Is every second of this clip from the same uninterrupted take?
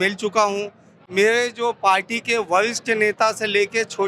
yes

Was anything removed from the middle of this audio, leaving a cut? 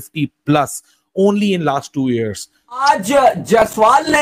yes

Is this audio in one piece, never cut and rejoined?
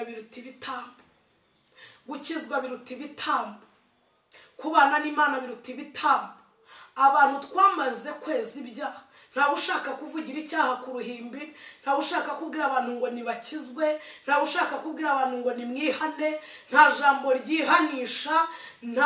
yes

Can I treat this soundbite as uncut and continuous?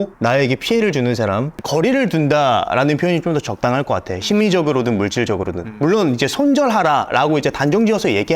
no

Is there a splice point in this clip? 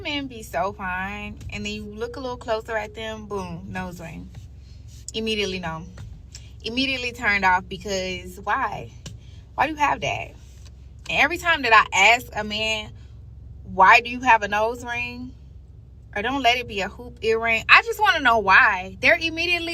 no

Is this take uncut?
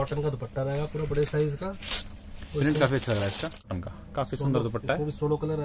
no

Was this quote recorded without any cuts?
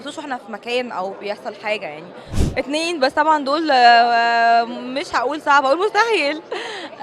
no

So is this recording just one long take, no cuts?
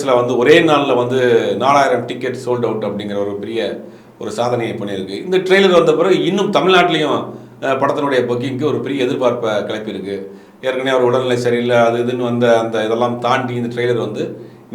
yes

